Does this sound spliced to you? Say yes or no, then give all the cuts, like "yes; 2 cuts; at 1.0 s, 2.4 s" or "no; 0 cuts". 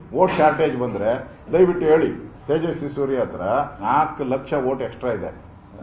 no; 0 cuts